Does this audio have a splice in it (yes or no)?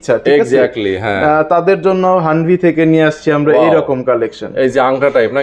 no